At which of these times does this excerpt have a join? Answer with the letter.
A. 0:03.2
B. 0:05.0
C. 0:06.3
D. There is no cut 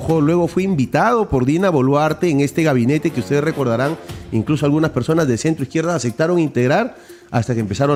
D